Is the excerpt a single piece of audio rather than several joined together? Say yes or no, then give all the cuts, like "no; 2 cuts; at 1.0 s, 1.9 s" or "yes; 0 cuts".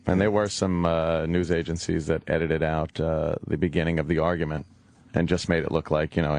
no; 1 cut; at 3.0 s